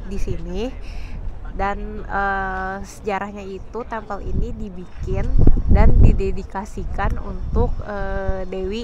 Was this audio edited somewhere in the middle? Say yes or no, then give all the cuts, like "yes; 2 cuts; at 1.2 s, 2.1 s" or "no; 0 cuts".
no; 0 cuts